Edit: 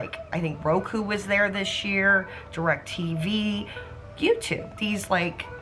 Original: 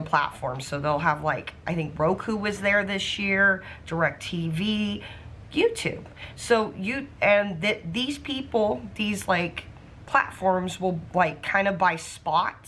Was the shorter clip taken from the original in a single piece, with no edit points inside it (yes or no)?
no